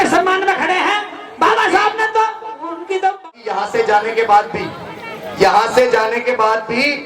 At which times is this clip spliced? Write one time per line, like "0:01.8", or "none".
0:03.3

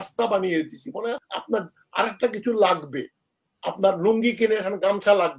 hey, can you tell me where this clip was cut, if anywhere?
0:01.3

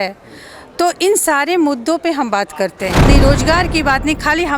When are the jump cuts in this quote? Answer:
0:03.0

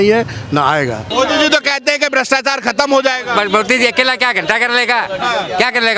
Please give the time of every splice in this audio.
0:01.1

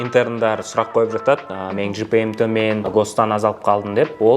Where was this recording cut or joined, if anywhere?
0:02.9

